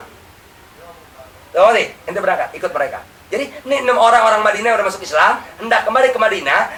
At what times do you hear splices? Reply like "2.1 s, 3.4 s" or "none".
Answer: none